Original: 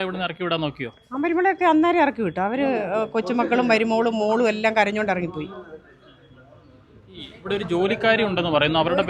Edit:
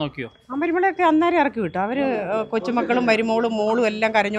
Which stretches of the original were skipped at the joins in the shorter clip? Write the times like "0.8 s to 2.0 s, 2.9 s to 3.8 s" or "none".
none